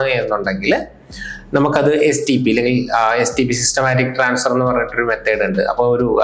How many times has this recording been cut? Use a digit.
0